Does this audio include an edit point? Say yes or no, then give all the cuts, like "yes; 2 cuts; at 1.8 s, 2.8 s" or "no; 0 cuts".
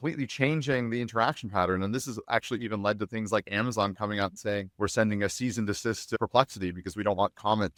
no; 0 cuts